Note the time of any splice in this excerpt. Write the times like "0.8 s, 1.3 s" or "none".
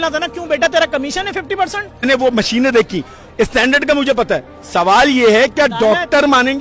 2.0 s